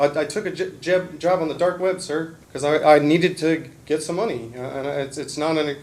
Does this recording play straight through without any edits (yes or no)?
no